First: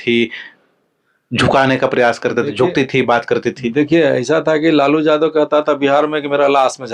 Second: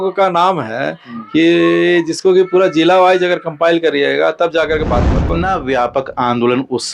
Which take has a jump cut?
second; 1 cut; at 5.3 s

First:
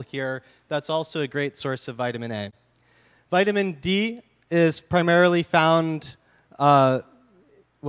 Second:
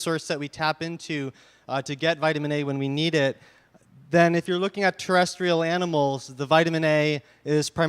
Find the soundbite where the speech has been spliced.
second; 1 cut; at 5.1 s

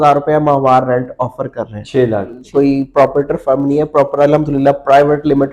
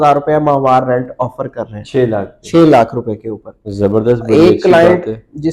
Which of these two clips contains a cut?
first; 1 cut; at 2.4 s

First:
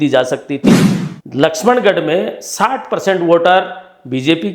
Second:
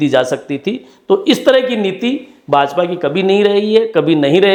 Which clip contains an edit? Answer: first; 1 cut; at 0.9 s

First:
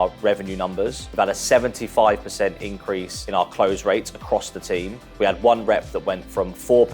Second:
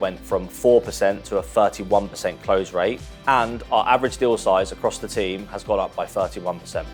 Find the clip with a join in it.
first; 3 cuts; at 1.0 s, 3.1 s, 5.0 s

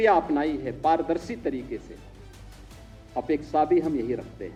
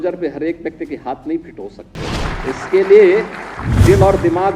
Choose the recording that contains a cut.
second; 1 cut; at 2.2 s

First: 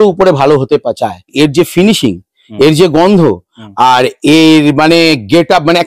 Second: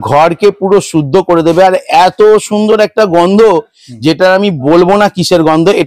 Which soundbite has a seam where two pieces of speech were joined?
first; 1 cut; at 1.3 s

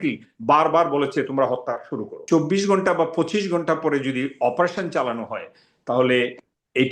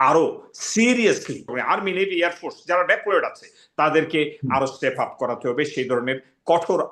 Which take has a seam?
first; 1 cut; at 2.2 s

